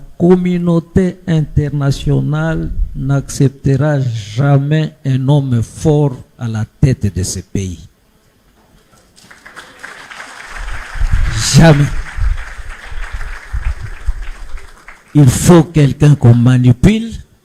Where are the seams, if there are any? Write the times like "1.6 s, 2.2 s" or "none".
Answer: none